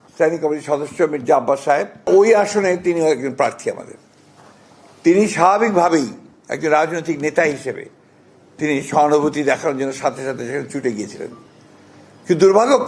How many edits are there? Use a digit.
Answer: 1